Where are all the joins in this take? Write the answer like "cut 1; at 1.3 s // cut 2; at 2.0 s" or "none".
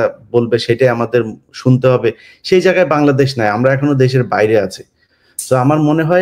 none